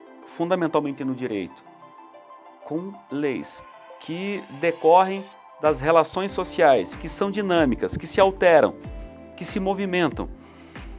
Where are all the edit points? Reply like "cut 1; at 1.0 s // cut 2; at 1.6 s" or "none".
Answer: none